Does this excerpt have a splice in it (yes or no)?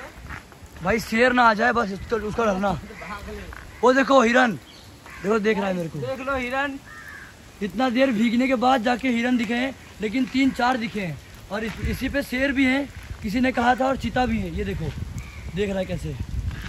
no